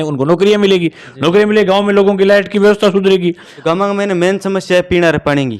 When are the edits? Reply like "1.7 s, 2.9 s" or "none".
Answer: 3.5 s